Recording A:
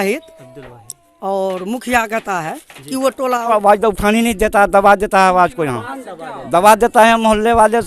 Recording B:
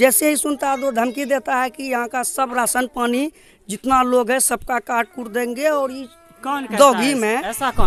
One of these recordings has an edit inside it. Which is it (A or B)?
A